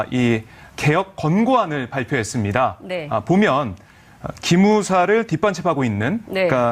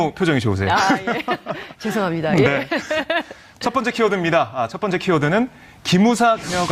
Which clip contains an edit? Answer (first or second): first